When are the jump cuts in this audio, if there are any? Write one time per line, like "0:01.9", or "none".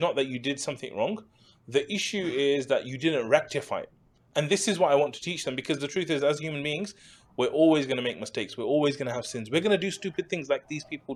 none